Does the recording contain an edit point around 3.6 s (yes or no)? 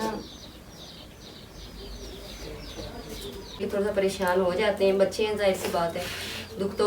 yes